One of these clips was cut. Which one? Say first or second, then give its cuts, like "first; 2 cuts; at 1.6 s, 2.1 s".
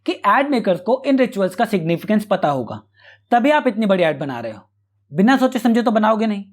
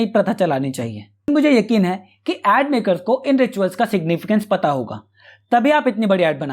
second; 1 cut; at 1.3 s